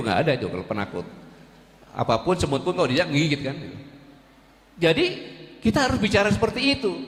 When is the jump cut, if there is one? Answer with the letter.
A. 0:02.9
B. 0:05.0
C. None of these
C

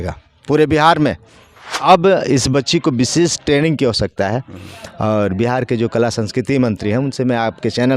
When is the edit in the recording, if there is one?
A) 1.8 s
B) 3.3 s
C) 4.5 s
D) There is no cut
A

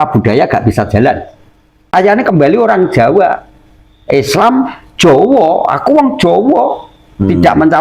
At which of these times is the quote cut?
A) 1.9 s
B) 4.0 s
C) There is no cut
A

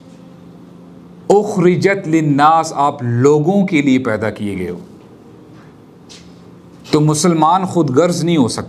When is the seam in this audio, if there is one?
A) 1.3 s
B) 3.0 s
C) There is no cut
C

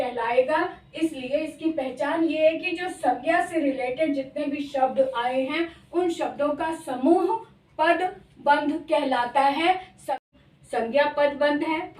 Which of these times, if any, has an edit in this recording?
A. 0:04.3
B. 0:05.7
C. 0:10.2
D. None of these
C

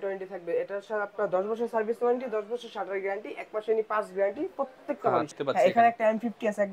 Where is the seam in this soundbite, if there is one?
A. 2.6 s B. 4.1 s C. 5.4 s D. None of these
C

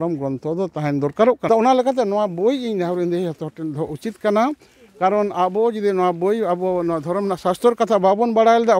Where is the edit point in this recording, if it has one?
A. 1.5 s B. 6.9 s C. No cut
A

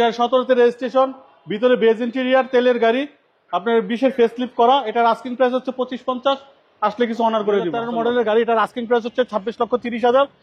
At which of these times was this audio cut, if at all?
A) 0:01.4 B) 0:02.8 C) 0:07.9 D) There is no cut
C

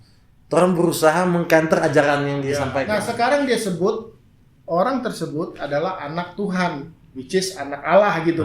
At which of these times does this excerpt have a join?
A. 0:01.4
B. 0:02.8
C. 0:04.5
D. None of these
B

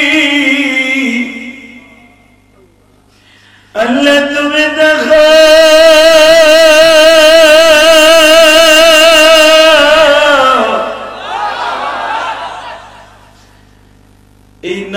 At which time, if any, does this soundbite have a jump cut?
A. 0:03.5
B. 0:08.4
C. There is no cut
A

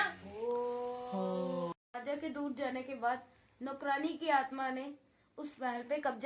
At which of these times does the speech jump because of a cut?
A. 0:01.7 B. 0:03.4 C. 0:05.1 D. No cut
A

